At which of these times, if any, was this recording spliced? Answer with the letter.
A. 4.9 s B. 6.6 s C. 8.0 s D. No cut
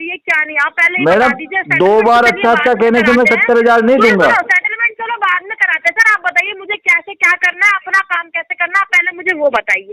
D